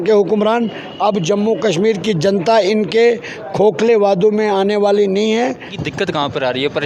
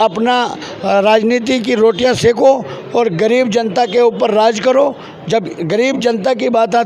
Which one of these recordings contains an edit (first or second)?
first